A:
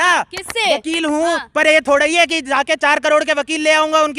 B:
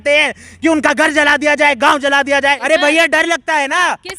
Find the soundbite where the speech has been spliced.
B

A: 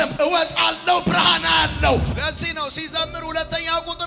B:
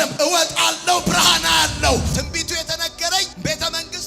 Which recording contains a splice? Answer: B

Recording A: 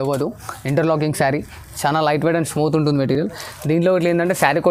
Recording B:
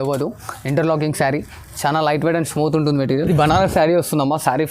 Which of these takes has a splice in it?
B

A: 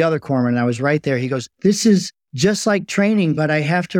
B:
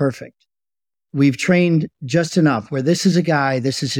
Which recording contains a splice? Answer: A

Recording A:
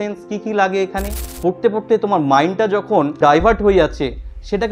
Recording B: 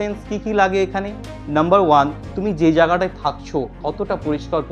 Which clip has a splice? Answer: A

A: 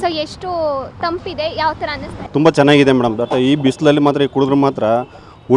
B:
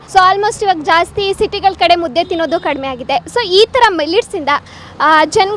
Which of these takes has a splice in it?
A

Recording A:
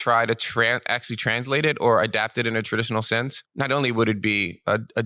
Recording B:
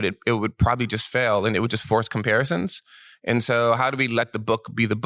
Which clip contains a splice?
A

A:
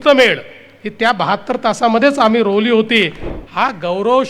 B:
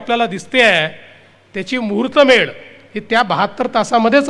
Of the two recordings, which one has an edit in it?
A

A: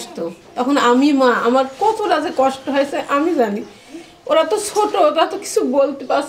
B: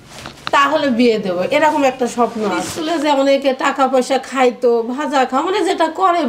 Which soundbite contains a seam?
B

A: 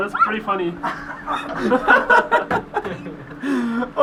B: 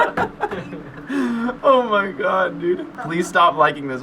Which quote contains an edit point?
B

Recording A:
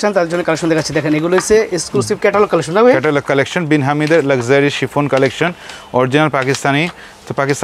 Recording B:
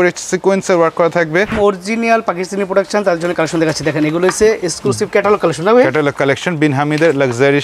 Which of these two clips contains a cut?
B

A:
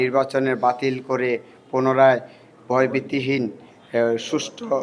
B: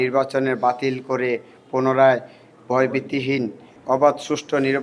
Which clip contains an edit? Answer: B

